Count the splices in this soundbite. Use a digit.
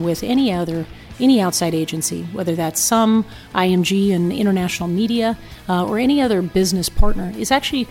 1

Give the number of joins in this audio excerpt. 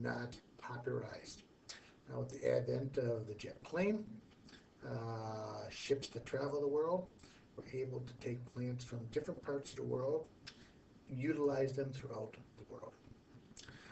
1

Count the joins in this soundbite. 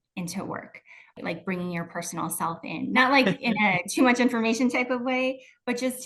2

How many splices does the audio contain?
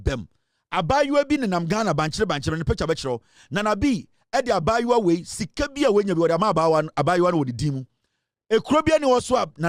0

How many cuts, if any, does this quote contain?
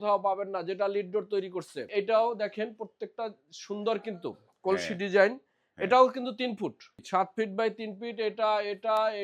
2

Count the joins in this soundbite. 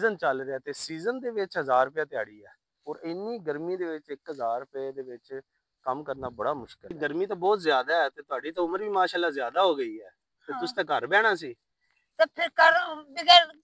1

